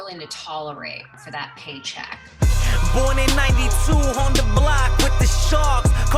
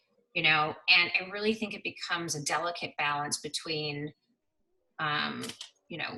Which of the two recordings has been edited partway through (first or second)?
first